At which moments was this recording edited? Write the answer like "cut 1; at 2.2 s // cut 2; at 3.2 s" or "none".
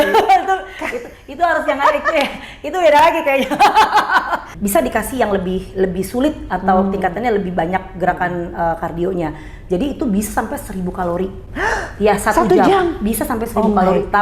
cut 1; at 4.5 s